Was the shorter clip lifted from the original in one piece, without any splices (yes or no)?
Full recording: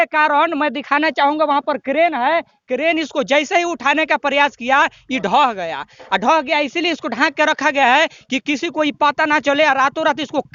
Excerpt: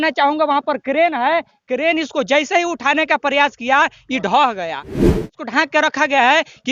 no